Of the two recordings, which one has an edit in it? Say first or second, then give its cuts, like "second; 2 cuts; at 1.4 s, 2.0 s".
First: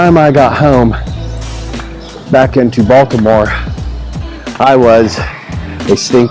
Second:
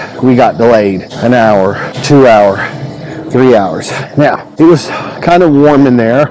second; 3 cuts; at 1.1 s, 1.9 s, 4.5 s